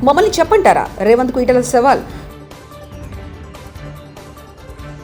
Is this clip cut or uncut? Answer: uncut